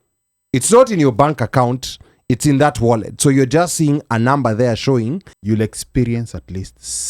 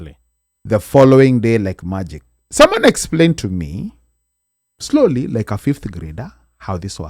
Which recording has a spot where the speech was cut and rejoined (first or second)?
first